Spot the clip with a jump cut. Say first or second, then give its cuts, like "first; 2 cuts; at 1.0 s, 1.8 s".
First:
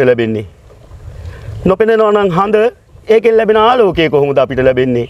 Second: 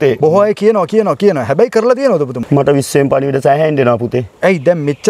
second; 1 cut; at 2.4 s